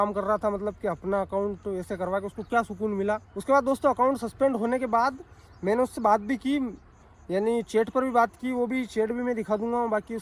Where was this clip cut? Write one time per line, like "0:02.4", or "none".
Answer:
none

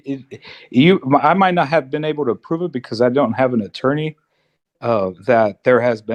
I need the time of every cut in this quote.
none

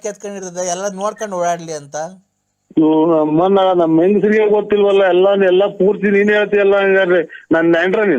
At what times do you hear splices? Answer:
0:02.6

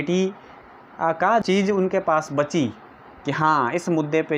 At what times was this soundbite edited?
0:01.4

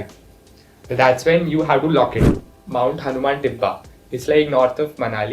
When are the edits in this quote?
0:02.6

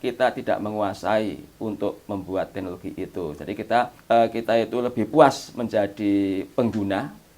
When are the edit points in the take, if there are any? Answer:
0:04.0

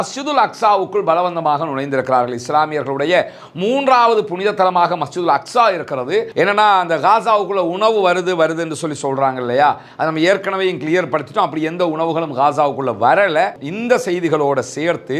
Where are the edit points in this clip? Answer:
0:06.3
0:13.7

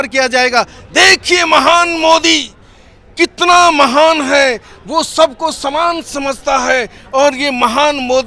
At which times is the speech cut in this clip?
none

